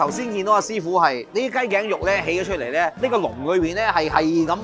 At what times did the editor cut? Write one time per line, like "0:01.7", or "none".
0:01.2
0:03.0